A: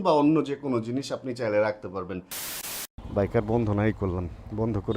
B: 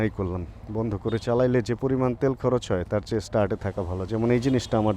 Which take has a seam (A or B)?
A